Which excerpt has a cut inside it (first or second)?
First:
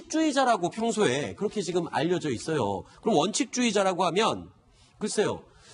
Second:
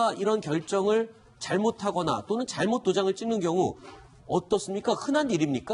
second